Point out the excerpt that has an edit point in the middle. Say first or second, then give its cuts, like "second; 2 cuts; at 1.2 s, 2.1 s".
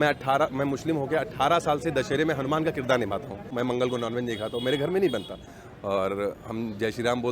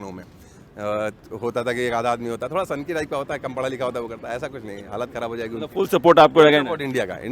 first; 2 cuts; at 3.5 s, 5.4 s